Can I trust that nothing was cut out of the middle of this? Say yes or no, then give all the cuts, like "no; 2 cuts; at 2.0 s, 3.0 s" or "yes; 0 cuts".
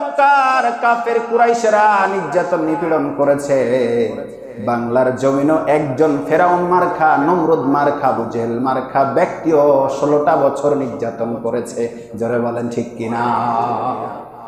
yes; 0 cuts